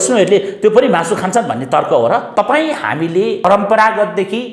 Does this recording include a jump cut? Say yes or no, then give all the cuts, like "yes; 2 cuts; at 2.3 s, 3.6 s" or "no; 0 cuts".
yes; 2 cuts; at 2.3 s, 3.5 s